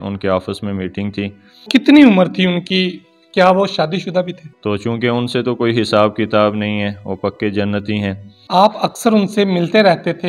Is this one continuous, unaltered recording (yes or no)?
no